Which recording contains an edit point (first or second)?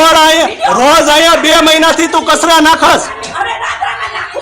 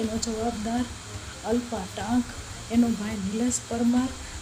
first